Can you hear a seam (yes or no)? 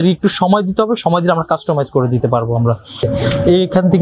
yes